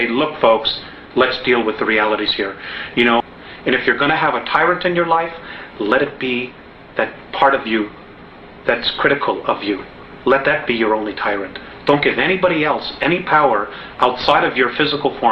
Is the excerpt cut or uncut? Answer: cut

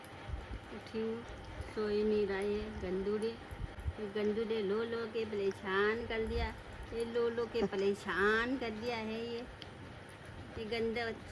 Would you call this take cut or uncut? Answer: uncut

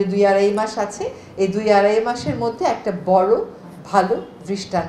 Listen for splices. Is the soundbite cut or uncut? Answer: uncut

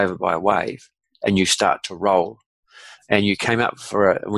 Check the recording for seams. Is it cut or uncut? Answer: uncut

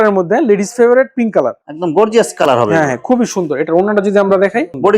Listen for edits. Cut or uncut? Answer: uncut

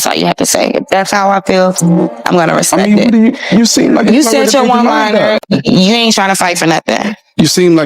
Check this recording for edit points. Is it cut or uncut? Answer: cut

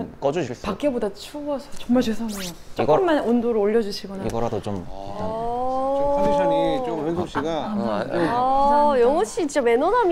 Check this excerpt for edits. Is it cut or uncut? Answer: uncut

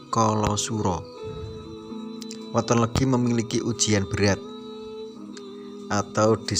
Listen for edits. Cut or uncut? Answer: cut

